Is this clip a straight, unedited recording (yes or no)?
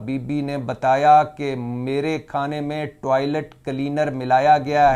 yes